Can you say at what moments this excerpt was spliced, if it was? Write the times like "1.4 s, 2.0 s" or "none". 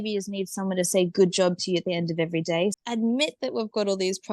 2.8 s